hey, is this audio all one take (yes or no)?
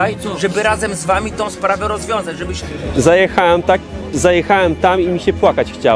no